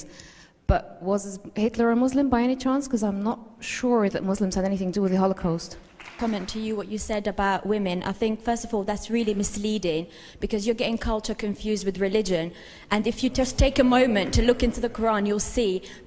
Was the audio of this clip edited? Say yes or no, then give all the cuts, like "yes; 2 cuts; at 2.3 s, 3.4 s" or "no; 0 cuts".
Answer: yes; 1 cut; at 6.1 s